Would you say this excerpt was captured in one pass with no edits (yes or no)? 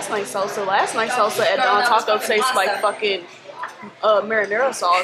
yes